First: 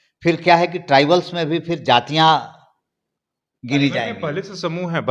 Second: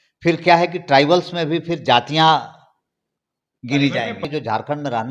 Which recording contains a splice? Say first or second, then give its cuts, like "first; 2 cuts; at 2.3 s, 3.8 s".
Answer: second; 1 cut; at 4.2 s